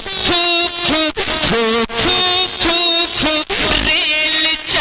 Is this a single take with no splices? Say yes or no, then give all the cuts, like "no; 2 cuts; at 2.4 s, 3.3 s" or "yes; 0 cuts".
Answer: yes; 0 cuts